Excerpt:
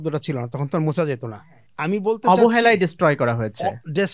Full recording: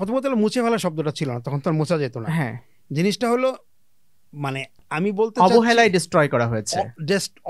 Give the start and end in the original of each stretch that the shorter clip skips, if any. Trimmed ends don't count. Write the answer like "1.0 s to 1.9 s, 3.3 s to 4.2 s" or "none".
2.3 s to 4.5 s